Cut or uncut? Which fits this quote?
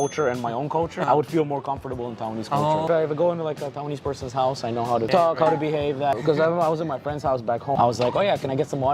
cut